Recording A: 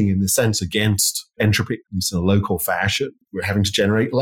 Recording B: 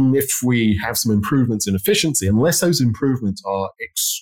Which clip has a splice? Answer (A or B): A